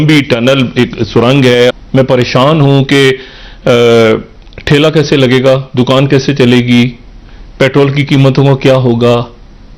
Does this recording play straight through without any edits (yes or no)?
no